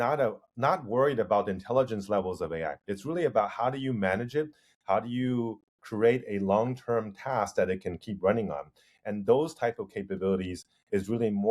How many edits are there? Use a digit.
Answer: 0